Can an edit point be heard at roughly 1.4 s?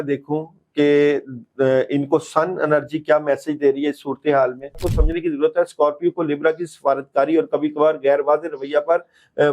no; 1 cut; at 4.8 s

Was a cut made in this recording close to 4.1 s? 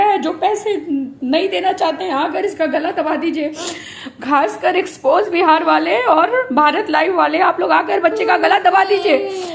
no; 0 cuts

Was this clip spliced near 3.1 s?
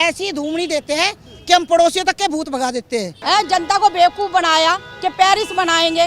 yes; 1 cut; at 3.1 s

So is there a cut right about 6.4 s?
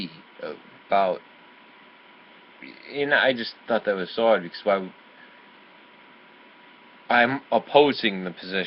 yes; 1 cut; at 6.4 s

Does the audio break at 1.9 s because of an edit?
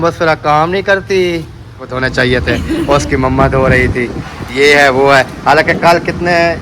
yes; 1 cut; at 1.9 s

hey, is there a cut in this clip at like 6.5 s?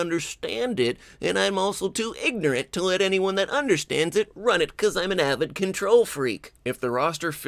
no; 0 cuts

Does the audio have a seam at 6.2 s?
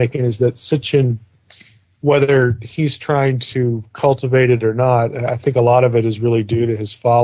yes; 1 cut; at 6.2 s

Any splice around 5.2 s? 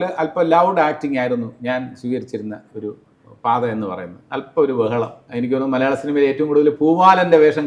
yes; 1 cut; at 5.2 s

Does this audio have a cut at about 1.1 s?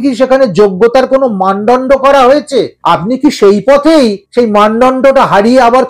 no; 2 cuts; at 2.7 s, 4.2 s

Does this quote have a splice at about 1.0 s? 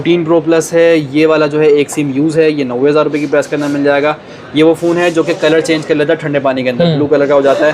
no; 0 cuts

